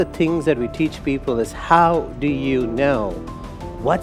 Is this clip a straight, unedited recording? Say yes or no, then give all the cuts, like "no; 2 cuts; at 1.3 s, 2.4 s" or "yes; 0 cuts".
yes; 0 cuts